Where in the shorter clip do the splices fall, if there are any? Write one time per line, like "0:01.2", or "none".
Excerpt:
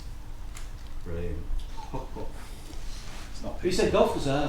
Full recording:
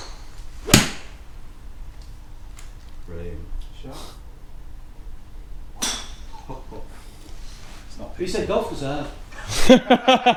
0:01.6

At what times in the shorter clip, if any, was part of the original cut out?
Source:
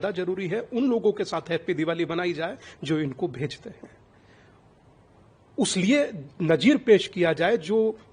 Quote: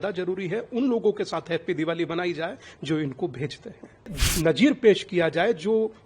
0:04.2

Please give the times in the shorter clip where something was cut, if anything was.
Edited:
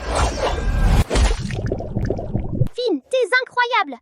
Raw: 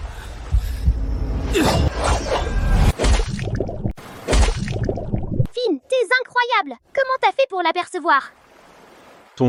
0:02.0

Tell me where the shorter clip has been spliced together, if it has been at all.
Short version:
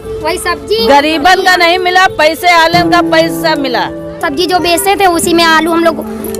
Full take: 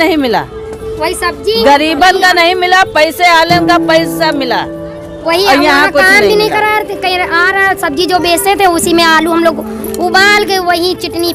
0:04.2

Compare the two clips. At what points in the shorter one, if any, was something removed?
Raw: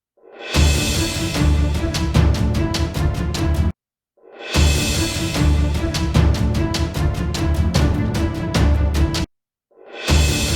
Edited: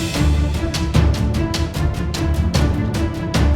0:02.4

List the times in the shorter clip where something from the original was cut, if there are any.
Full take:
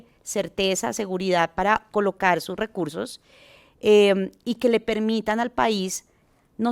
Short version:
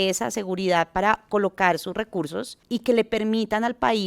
0:02.6

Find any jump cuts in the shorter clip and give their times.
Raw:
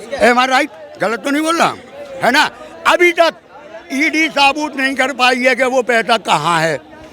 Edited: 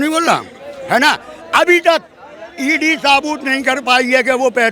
none

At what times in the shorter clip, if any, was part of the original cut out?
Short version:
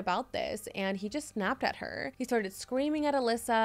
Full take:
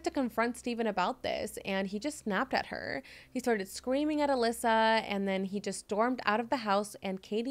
0:02.1

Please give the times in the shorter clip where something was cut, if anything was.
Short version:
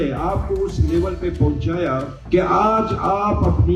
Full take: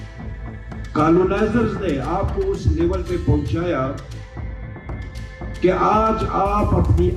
0:02.2

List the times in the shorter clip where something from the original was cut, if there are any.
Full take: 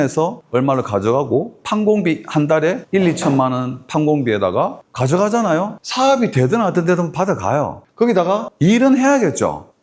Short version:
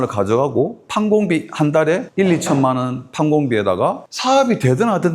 0:04.1

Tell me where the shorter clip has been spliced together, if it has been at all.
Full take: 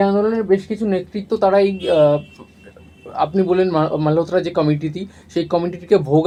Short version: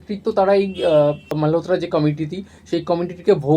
0:01.3

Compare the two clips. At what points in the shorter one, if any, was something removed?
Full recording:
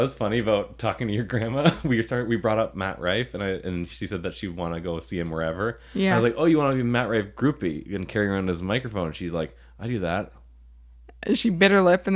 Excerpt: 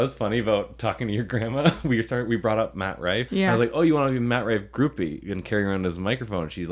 0:03.3

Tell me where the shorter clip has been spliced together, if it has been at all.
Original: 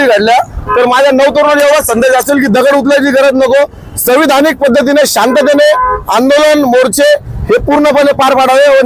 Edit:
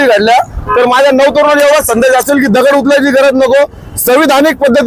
none

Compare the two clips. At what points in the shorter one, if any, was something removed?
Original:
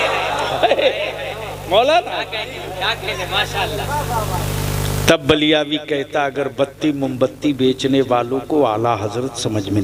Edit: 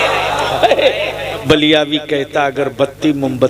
0:01.4

